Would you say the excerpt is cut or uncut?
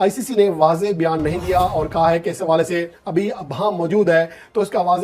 uncut